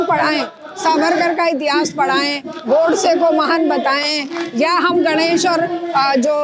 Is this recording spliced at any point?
no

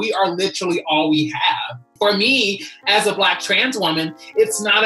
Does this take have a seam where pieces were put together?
yes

